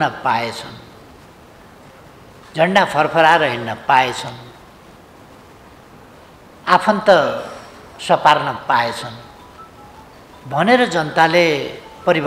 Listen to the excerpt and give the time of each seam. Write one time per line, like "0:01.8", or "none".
none